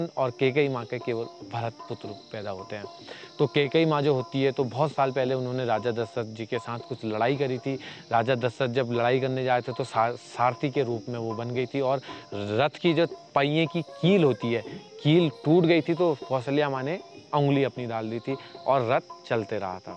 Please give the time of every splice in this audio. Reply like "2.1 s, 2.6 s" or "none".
none